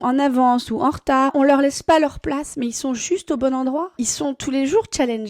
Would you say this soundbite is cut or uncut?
cut